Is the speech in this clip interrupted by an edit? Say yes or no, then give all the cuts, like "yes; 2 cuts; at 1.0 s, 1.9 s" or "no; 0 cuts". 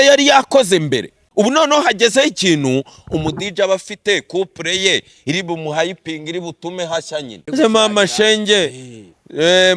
yes; 2 cuts; at 1.2 s, 7.4 s